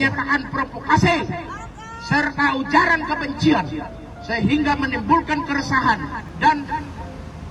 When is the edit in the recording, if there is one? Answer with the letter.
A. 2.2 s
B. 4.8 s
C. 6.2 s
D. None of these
C